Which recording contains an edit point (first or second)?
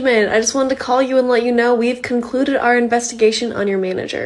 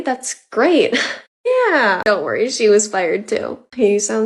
second